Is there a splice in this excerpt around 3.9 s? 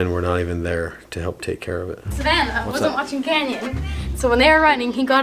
no; 1 cut; at 2.0 s

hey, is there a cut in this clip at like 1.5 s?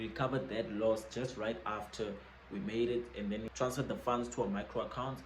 no; 1 cut; at 3.5 s

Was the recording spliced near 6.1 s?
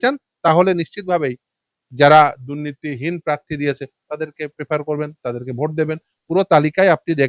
yes; 1 cut; at 6.1 s

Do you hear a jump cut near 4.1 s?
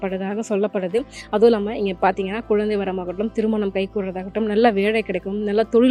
no; 0 cuts

